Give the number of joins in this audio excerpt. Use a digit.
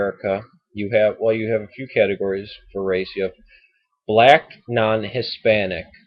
1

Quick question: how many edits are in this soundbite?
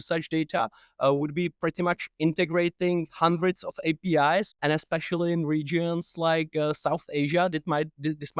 1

